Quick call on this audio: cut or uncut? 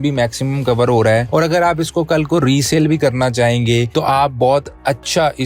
uncut